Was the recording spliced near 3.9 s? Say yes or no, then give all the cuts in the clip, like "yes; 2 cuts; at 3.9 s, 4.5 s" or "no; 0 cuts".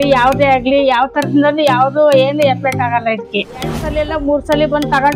yes; 1 cut; at 3.9 s